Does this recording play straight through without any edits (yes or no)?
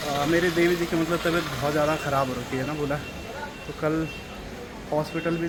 yes